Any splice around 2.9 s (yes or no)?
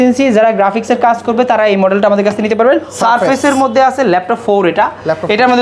yes